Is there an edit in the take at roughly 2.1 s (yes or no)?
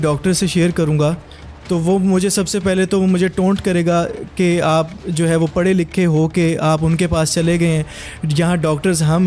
no